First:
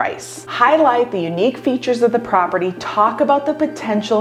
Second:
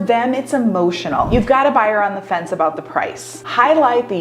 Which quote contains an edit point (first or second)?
second